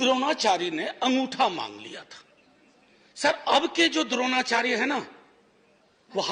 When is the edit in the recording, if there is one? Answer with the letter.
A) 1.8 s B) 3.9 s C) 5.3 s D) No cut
D